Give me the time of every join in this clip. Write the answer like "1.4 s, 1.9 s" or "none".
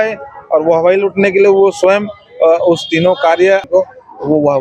3.6 s